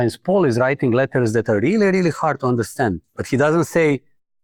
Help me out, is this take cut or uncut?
uncut